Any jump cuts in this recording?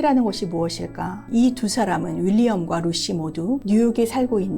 yes; 2 cuts; at 1.2 s, 3.6 s

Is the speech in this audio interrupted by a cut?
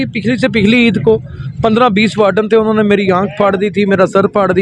no; 0 cuts

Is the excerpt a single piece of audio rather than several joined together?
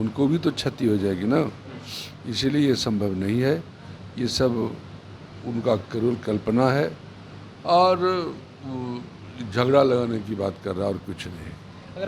yes; 0 cuts

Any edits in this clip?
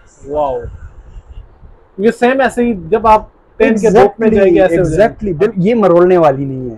yes; 1 cut; at 5.5 s

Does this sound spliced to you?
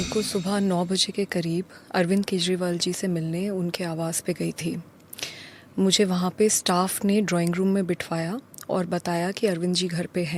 no; 0 cuts

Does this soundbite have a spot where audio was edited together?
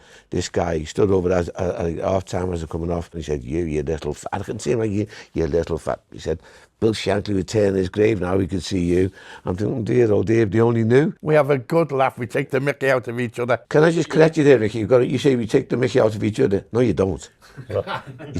yes; 3 cuts; at 3.2 s, 11.2 s, 13.6 s

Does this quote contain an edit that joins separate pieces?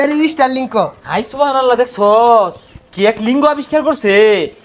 no; 0 cuts

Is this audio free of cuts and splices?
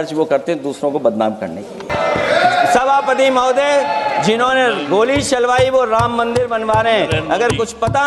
no; 1 cut; at 1.9 s

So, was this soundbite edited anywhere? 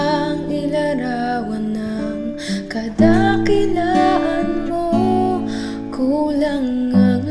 no; 0 cuts

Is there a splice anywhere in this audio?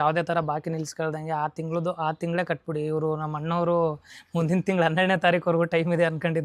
no; 0 cuts

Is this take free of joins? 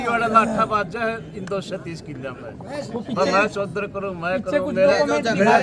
yes; 0 cuts

